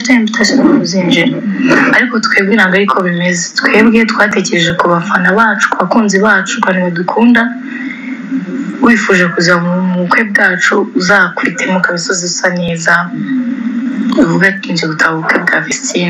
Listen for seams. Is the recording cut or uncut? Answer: uncut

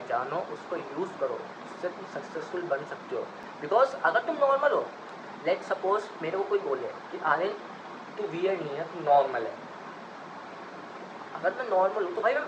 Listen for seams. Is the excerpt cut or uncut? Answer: uncut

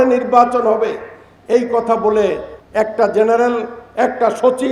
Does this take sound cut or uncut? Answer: cut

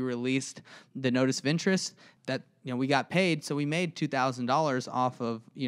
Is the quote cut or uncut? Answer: cut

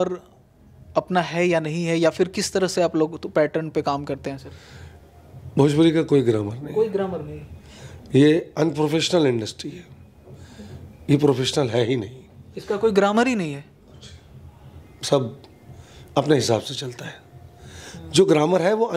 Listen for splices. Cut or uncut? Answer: uncut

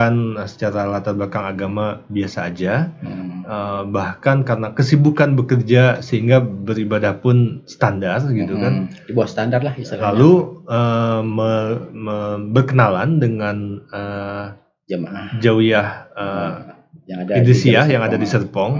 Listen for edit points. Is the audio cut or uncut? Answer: uncut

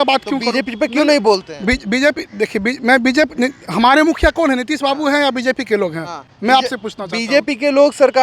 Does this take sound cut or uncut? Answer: uncut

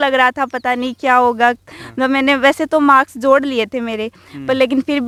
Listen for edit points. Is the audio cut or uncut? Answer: uncut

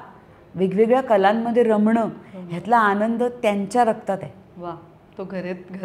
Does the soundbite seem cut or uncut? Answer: uncut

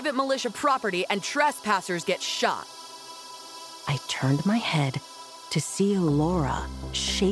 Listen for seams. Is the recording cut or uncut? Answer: cut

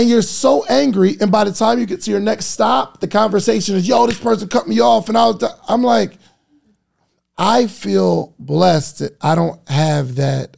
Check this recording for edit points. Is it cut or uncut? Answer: uncut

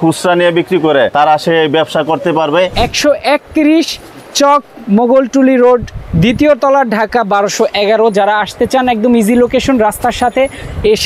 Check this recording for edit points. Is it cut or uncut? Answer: cut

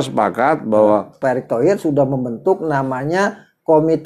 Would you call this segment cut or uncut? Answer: cut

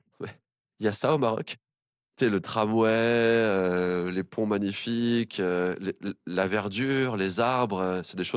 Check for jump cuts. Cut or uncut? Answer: uncut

